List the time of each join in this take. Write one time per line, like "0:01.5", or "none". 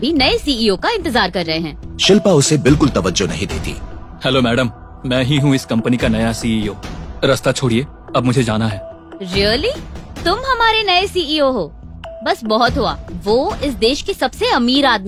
none